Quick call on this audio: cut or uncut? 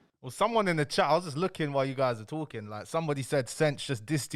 uncut